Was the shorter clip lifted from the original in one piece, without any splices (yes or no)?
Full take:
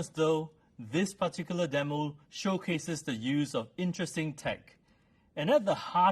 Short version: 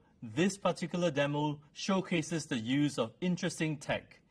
yes